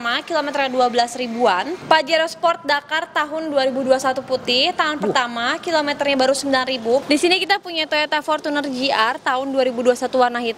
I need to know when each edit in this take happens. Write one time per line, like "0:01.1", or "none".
0:01.7
0:07.0